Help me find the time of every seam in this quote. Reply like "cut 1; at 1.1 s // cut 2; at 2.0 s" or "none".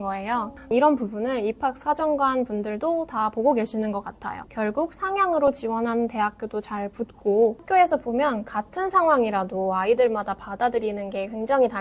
cut 1; at 4.5 s // cut 2; at 7.6 s